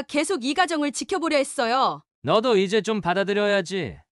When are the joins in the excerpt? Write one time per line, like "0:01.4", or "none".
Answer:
0:02.1